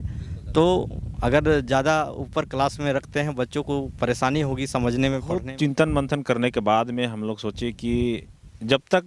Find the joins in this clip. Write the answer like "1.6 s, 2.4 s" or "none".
5.4 s